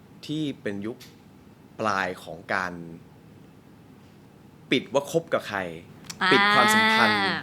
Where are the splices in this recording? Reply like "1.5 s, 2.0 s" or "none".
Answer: none